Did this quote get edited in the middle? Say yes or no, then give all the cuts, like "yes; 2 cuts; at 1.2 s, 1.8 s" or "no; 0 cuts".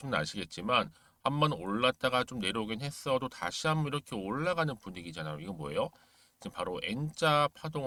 no; 0 cuts